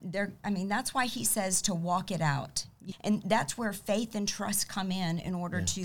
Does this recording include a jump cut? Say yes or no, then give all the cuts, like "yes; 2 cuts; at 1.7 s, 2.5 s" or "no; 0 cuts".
yes; 1 cut; at 2.8 s